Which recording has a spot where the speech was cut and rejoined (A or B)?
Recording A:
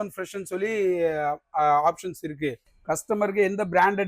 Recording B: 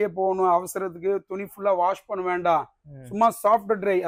A